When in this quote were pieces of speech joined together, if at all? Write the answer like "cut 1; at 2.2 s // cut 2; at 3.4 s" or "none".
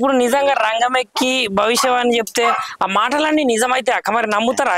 none